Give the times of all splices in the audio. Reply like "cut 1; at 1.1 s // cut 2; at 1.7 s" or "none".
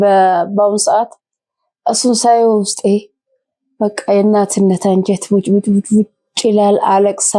none